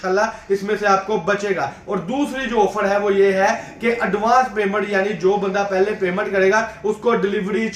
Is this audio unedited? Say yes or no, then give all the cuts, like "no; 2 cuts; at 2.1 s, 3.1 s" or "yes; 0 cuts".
yes; 0 cuts